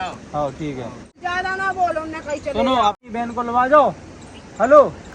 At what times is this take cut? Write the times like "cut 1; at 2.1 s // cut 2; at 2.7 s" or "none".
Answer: cut 1; at 1.2 s // cut 2; at 3.0 s